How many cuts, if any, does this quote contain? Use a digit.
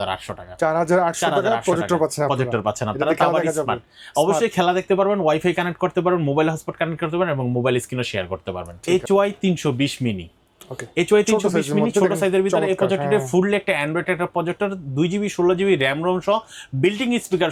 0